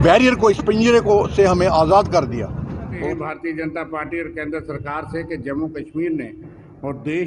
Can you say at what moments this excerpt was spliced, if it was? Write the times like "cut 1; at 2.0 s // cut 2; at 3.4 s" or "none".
cut 1; at 2.9 s